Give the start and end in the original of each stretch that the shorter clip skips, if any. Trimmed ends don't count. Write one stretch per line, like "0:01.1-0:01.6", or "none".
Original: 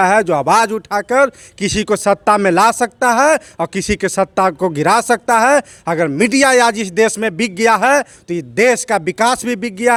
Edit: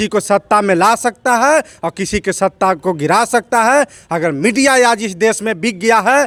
none